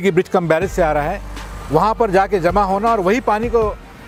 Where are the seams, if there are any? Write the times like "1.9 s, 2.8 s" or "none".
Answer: none